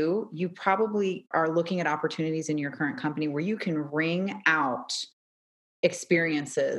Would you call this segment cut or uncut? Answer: cut